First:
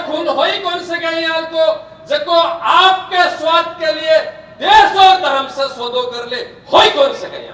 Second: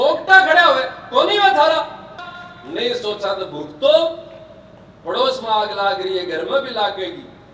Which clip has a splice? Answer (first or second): second